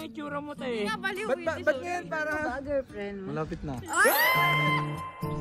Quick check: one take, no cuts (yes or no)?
yes